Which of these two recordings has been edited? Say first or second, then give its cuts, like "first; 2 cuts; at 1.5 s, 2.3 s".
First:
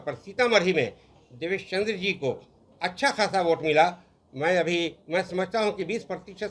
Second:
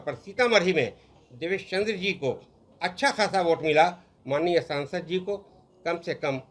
second; 1 cut; at 4.1 s